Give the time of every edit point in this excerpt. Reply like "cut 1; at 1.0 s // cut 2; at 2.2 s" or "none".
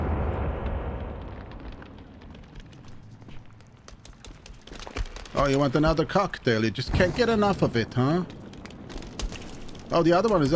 none